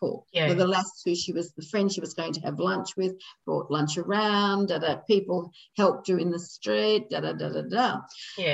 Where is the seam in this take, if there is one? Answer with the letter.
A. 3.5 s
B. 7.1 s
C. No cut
C